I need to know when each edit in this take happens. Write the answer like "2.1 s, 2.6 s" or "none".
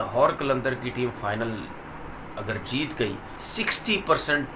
3.4 s